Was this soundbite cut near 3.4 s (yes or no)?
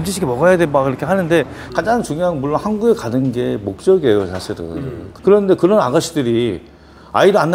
no